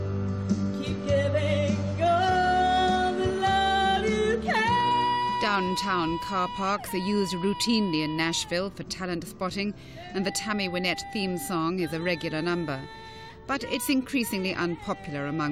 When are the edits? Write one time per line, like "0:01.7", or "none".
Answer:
0:07.5